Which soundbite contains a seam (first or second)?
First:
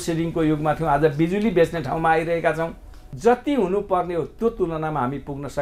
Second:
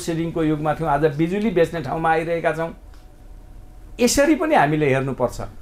first